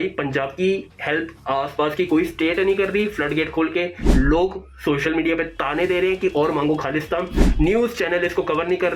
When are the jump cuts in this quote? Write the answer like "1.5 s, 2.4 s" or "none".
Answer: none